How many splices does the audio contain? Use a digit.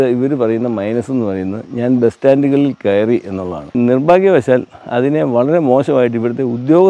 1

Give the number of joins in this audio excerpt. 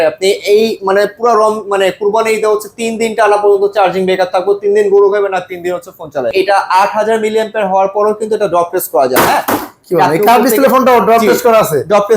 1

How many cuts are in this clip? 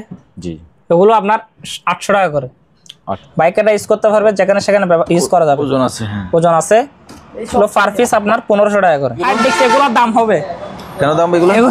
2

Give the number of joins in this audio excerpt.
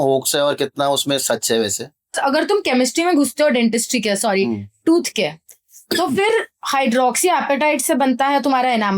1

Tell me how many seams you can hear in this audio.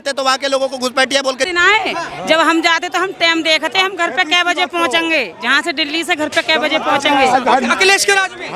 1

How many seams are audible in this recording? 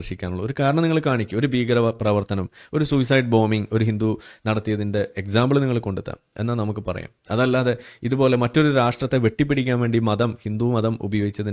0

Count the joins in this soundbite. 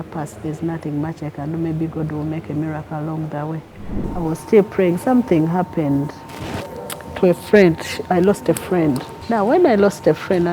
2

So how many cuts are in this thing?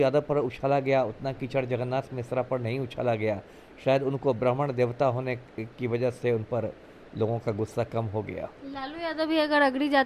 0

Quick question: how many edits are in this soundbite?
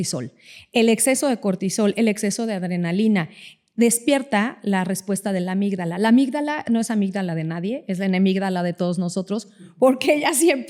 0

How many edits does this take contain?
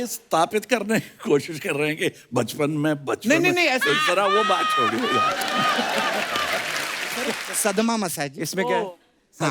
1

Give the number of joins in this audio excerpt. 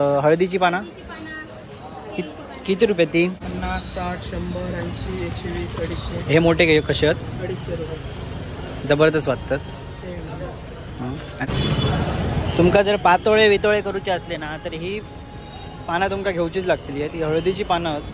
2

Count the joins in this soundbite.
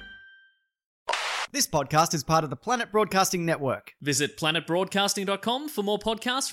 1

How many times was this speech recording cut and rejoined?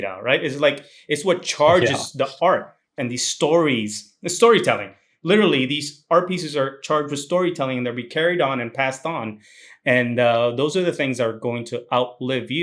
1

